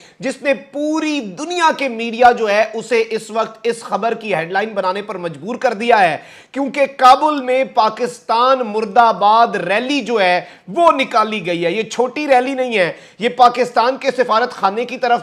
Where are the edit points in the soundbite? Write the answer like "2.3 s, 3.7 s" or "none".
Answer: none